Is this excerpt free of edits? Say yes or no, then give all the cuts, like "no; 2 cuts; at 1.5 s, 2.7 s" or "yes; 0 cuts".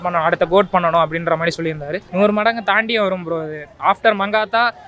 no; 2 cuts; at 2.0 s, 3.7 s